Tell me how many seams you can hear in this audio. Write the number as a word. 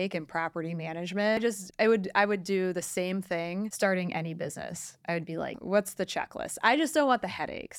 two